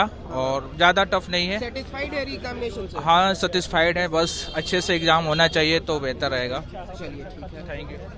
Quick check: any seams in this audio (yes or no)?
no